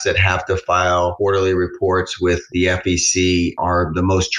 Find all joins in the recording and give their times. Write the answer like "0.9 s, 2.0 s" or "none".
1.1 s, 3.6 s